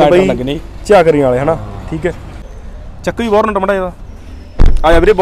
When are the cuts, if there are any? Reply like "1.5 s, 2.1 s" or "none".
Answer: 2.4 s